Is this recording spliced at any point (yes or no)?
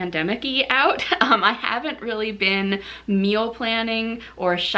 no